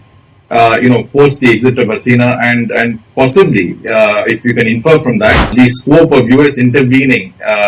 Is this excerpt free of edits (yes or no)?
no